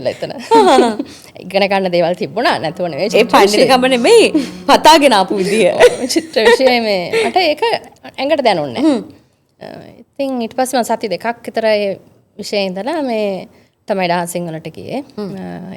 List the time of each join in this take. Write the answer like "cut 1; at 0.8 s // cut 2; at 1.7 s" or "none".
none